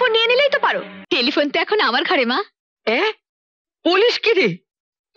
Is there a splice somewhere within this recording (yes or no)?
yes